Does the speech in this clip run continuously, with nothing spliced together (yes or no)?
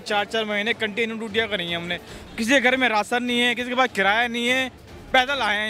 no